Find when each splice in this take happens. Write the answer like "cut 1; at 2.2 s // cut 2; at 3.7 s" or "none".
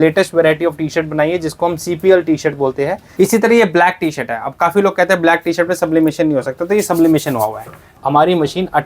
cut 1; at 3.0 s // cut 2; at 7.9 s